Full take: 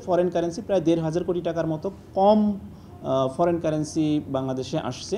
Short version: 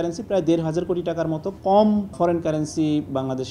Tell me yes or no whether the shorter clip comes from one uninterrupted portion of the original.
no